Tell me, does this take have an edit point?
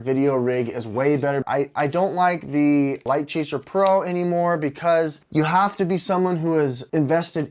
yes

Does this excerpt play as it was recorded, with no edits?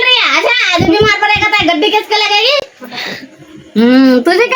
yes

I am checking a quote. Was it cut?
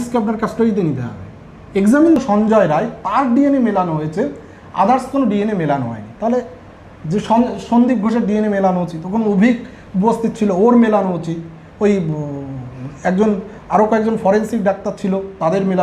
yes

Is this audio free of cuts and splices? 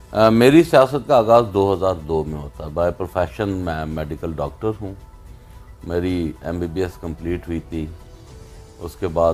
yes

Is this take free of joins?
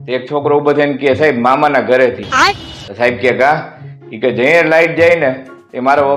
yes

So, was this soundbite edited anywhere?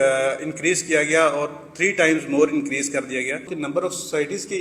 yes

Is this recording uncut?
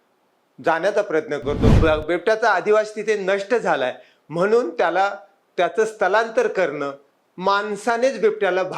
no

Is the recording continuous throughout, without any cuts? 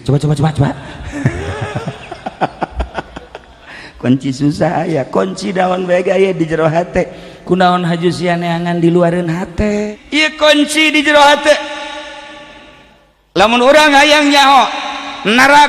no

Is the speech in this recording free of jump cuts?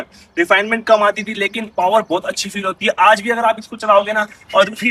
yes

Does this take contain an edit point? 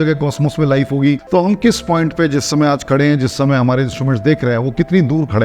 yes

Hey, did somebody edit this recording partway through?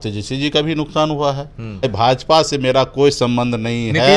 yes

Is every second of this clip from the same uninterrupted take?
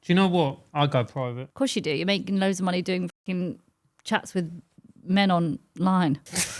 no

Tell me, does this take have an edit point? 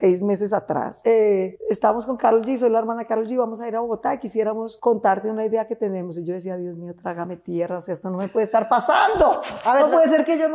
yes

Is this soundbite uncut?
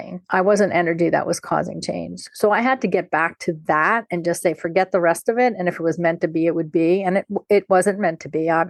yes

